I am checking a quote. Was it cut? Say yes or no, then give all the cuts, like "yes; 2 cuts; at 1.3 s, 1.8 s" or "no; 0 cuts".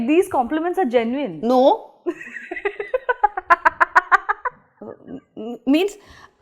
no; 0 cuts